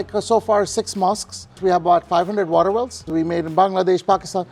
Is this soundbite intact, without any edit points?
no; 2 cuts; at 1.6 s, 3.0 s

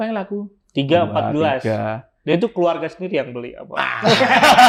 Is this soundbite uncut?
yes; 0 cuts

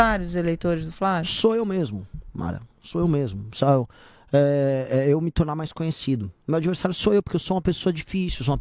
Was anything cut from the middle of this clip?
no; 0 cuts

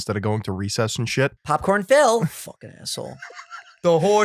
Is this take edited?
yes; 1 cut; at 1.4 s

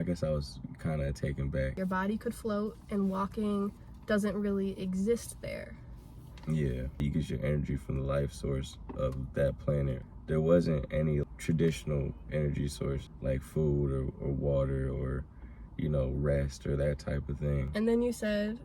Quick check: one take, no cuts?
no; 6 cuts; at 1.8 s, 7.0 s, 10.0 s, 11.2 s, 13.1 s, 17.7 s

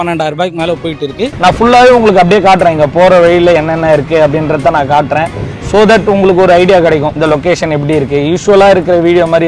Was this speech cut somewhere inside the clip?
yes; 2 cuts; at 1.3 s, 7.1 s

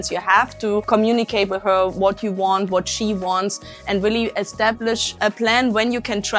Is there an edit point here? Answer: yes; 2 cuts; at 0.9 s, 5.2 s

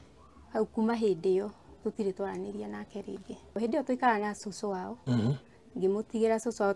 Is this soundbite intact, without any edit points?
no; 1 cut; at 3.6 s

